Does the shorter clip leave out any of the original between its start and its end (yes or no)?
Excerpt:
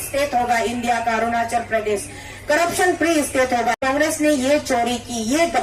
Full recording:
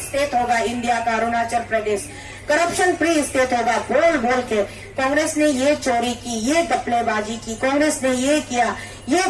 yes